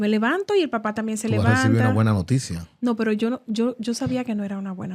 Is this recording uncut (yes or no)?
yes